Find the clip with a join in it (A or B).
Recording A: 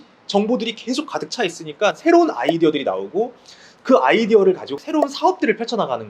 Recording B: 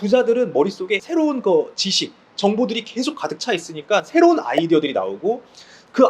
B